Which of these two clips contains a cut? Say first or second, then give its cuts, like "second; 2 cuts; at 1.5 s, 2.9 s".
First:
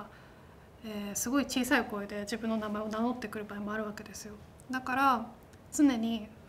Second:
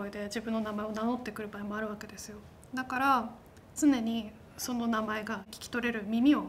second; 1 cut; at 5.6 s